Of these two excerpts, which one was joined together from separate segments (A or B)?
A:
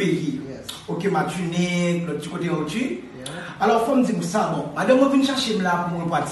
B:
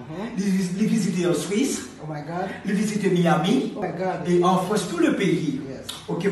B